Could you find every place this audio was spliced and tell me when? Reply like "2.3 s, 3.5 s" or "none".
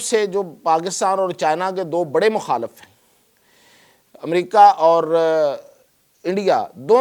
none